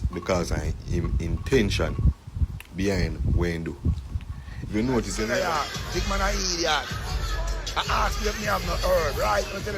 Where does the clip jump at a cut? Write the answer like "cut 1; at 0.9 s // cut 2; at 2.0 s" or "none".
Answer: cut 1; at 5.2 s